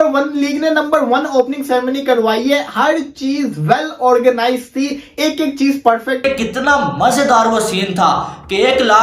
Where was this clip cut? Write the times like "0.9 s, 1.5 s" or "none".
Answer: 6.2 s